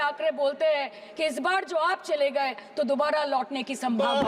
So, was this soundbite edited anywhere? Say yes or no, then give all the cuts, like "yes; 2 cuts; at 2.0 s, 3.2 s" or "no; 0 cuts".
no; 0 cuts